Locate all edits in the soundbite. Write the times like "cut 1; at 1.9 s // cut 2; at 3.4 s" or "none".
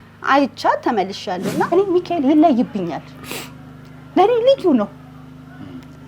cut 1; at 1.7 s